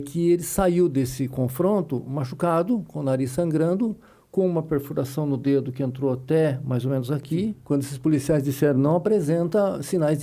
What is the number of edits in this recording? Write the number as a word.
one